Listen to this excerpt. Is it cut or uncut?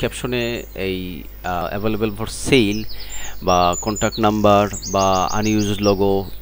cut